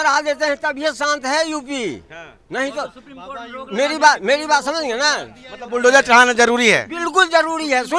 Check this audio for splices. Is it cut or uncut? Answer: uncut